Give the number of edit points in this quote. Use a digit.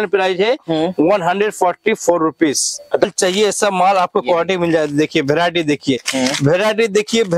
1